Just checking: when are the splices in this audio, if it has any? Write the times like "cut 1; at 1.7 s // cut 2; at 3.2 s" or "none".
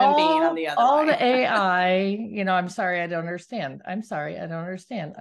none